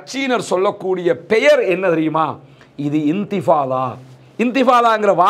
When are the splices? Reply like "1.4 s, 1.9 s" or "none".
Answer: none